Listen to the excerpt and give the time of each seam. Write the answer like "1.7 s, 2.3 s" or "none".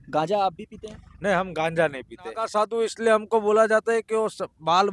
2.5 s